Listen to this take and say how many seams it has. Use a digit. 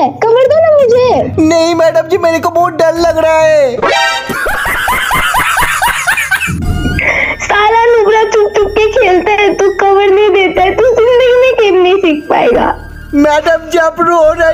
0